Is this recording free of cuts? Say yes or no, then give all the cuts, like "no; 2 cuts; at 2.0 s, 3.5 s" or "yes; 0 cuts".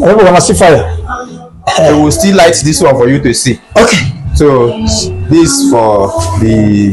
yes; 0 cuts